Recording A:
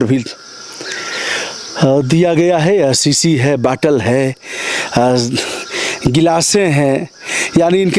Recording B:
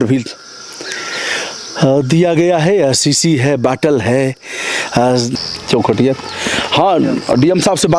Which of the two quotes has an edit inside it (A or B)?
B